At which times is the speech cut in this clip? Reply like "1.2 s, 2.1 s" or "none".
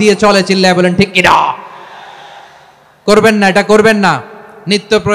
none